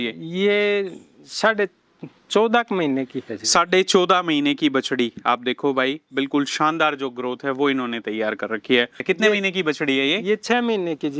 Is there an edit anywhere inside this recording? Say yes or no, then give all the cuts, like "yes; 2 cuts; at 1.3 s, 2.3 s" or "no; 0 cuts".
yes; 1 cut; at 9.0 s